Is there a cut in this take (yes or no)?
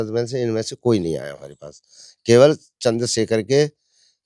no